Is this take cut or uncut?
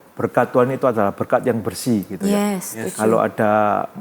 uncut